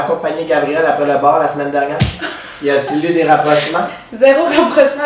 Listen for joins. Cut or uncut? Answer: uncut